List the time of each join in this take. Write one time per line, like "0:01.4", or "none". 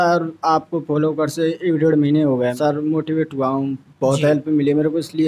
0:02.6